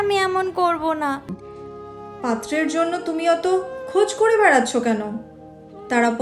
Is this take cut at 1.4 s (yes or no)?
yes